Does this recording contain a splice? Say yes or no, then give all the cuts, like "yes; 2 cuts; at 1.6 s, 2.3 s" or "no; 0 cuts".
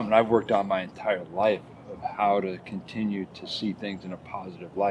no; 0 cuts